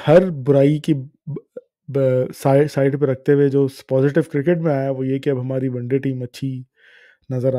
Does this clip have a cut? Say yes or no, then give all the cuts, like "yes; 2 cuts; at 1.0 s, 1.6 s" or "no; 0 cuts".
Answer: no; 0 cuts